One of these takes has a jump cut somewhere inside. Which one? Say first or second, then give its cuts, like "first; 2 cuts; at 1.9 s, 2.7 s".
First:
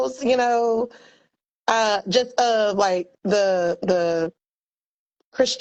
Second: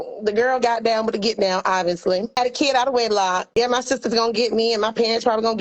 second; 2 cuts; at 2.4 s, 3.5 s